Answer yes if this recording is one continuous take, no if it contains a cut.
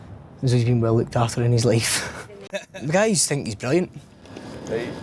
no